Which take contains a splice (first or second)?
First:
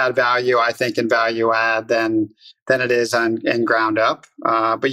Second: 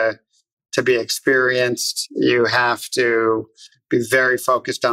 second